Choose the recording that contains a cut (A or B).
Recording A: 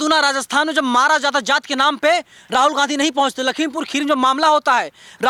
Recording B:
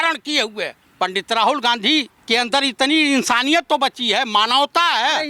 B